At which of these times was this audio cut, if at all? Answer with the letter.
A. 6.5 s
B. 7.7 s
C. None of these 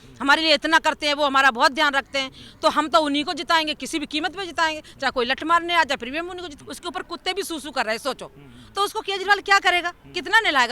A